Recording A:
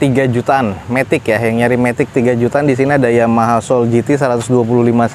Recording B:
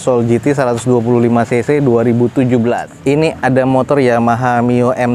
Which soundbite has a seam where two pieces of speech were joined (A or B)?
B